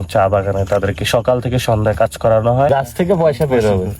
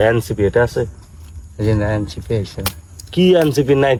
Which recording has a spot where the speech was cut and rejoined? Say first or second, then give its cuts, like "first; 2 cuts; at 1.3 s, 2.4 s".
first; 1 cut; at 2.7 s